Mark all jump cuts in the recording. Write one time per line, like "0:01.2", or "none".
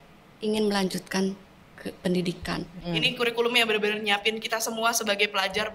0:02.7

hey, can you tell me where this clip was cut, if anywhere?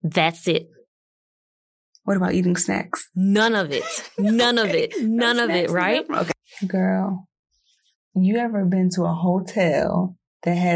0:06.4

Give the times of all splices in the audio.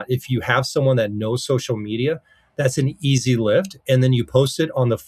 none

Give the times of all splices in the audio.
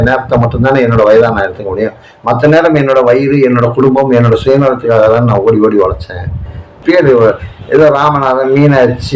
0:06.8

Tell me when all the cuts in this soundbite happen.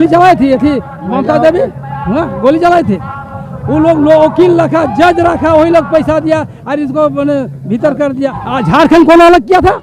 0:08.4

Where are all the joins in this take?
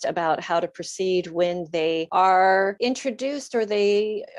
0:02.1
0:02.8

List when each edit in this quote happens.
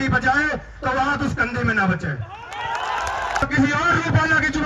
0:03.4

